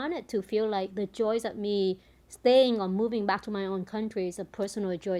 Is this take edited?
no; 0 cuts

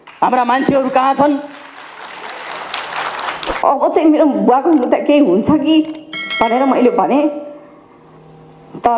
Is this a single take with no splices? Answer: no; 1 cut; at 3.6 s

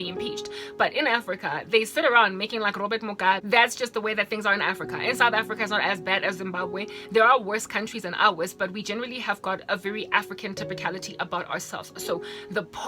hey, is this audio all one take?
no; 1 cut; at 3.4 s

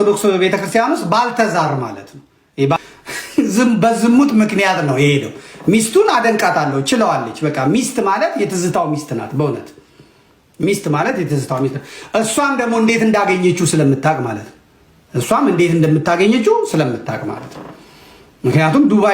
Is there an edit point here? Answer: yes; 1 cut; at 2.8 s

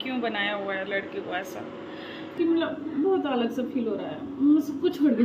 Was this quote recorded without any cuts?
no; 1 cut; at 2.3 s

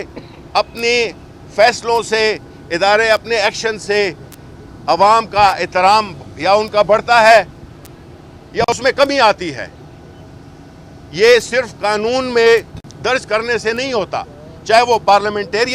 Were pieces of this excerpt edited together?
no; 0 cuts

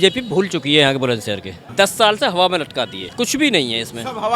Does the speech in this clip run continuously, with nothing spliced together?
no; 2 cuts; at 1.6 s, 3.0 s

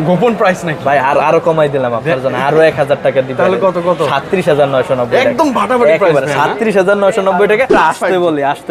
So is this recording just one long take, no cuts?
no; 1 cut; at 7.7 s

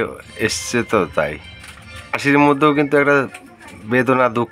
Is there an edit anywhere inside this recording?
yes; 1 cut; at 2.2 s

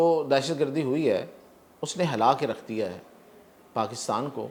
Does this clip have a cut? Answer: no; 0 cuts

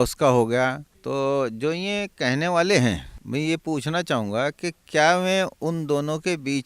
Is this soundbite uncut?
no; 2 cuts; at 0.9 s, 3.1 s

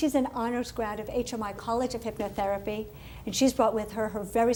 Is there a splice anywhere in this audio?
no; 0 cuts

